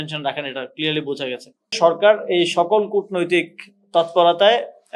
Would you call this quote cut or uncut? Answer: cut